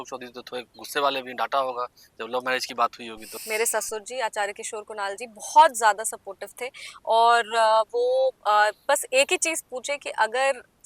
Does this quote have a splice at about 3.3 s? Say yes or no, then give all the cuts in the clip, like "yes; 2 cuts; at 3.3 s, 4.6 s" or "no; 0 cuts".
yes; 1 cut; at 3.3 s